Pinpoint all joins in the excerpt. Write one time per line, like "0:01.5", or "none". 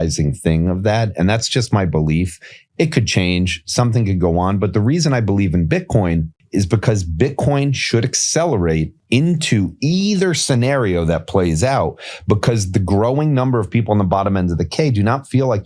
0:06.4
0:08.9